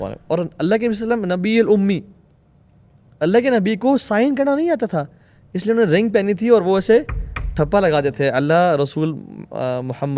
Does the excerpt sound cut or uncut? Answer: uncut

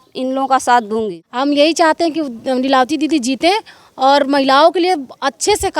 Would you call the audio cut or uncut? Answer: cut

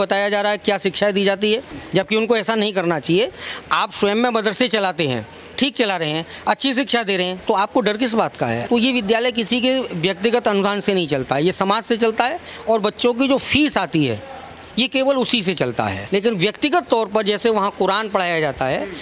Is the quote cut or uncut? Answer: cut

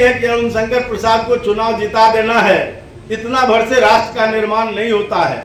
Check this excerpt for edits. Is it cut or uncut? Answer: uncut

